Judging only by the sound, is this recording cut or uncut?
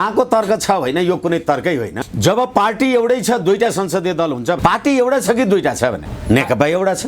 cut